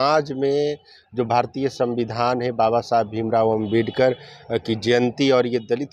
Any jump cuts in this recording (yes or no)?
no